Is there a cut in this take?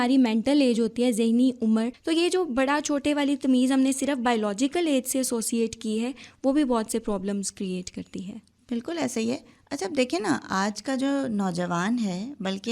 yes; 1 cut; at 2.0 s

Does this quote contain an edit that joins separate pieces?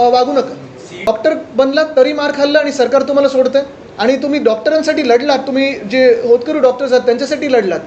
yes; 1 cut; at 1.1 s

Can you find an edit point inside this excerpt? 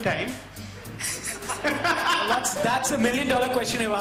no; 0 cuts

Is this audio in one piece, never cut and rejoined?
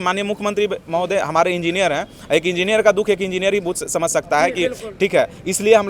yes; 0 cuts

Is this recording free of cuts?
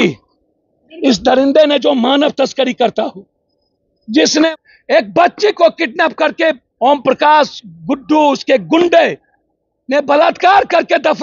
no; 1 cut; at 4.5 s

